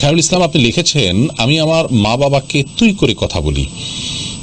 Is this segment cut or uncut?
uncut